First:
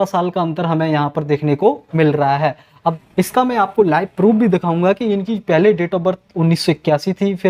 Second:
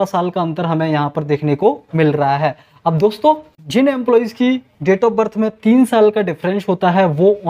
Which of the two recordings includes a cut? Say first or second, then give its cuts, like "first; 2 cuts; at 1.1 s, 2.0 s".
first; 1 cut; at 3.0 s